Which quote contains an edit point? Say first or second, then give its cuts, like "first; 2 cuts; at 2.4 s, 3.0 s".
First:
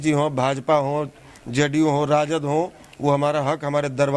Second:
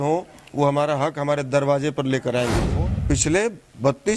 second; 1 cut; at 2.7 s